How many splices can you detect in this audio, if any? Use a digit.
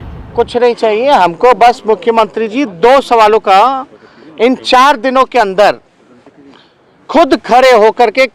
0